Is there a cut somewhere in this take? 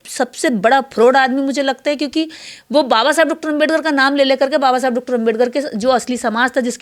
no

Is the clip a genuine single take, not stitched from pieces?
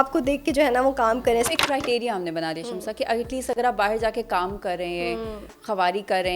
no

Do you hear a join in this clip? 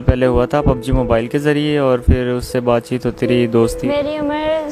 yes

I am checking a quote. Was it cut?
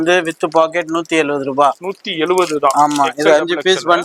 no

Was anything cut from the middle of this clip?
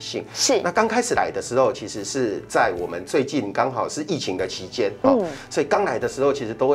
no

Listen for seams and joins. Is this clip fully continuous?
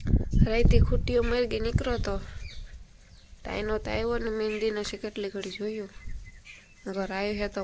yes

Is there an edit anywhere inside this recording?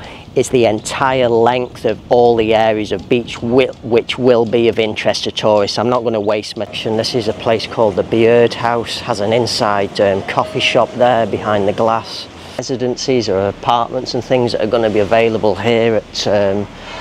yes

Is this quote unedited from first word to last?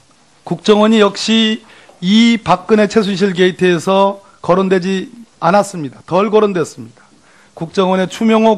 no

